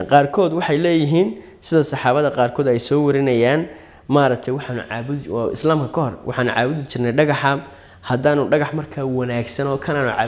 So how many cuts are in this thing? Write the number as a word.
zero